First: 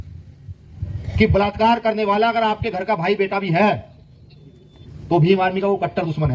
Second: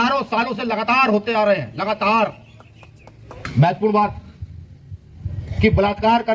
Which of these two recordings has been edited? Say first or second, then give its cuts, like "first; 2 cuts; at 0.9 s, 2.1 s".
second; 1 cut; at 3.4 s